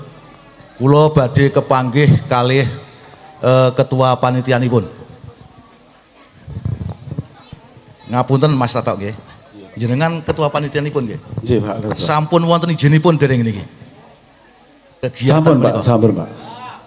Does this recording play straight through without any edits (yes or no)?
no